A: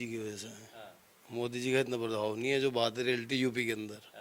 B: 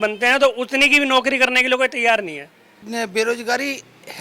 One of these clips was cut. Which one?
B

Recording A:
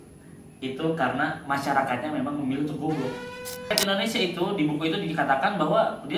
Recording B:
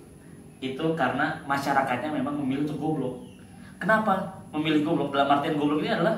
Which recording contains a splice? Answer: A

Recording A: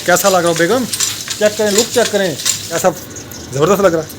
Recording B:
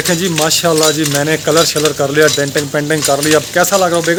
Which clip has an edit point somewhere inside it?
A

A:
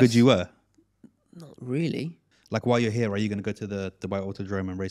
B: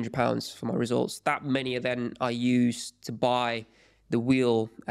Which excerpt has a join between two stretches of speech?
A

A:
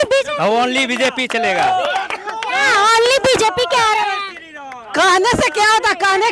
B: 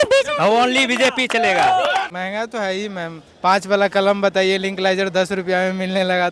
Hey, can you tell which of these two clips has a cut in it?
B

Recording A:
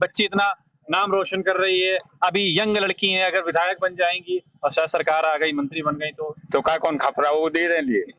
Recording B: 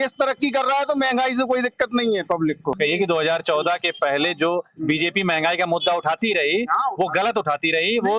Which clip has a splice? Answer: B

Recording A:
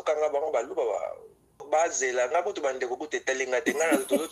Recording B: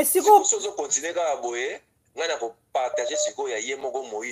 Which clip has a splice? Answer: A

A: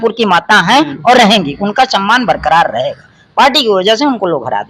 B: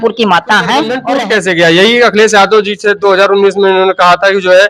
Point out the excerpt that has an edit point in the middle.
B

